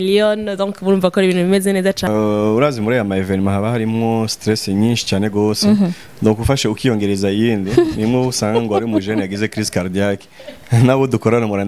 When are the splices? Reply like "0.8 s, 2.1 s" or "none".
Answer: 2.1 s